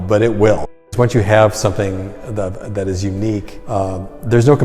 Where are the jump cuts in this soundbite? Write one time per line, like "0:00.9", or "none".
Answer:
0:00.9
0:03.6